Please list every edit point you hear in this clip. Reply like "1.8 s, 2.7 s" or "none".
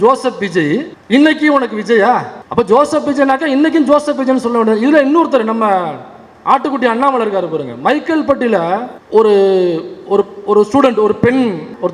none